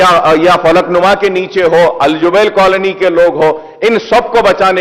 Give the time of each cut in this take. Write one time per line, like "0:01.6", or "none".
none